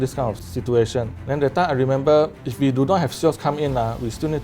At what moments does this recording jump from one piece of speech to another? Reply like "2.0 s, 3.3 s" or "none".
1.2 s, 2.4 s